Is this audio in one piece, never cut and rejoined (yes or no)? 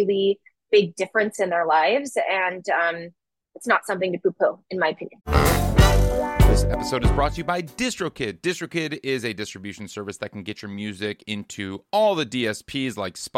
no